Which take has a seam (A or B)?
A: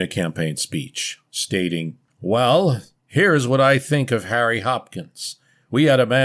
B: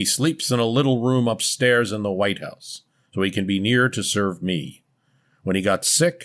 A